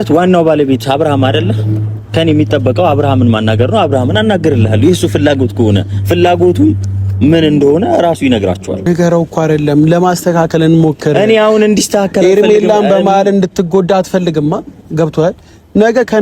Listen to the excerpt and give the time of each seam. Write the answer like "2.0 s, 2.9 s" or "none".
8.9 s